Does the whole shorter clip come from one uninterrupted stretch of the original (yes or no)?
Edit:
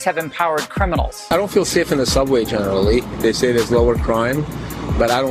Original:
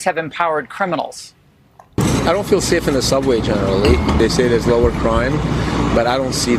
no